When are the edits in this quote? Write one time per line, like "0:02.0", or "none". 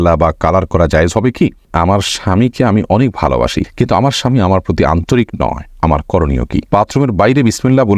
0:01.7
0:06.7